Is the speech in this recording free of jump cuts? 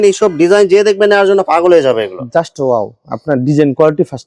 yes; 0 cuts

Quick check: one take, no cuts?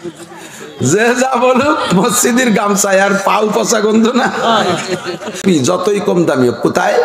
no; 1 cut; at 5.4 s

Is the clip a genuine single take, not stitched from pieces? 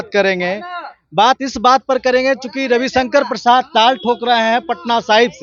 yes; 0 cuts

